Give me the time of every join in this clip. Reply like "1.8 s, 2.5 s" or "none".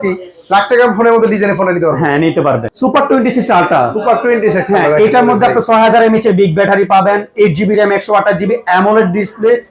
2.7 s